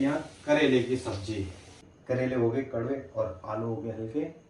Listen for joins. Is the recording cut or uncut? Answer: cut